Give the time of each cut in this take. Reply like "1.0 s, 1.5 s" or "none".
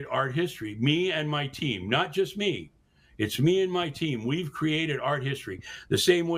none